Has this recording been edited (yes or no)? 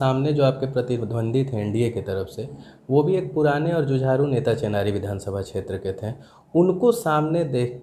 no